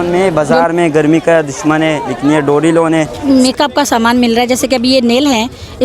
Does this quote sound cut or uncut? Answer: cut